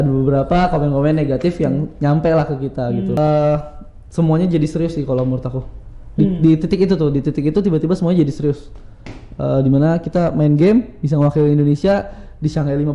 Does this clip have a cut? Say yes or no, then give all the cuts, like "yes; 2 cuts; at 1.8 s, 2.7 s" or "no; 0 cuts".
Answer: yes; 1 cut; at 3.1 s